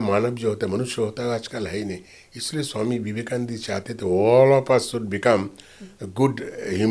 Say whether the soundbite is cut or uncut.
uncut